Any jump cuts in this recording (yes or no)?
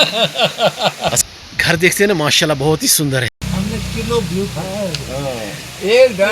yes